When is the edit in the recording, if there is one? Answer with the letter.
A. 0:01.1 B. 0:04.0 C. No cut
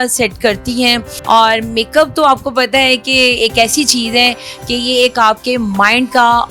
A